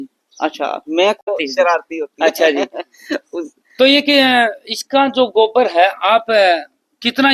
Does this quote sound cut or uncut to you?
cut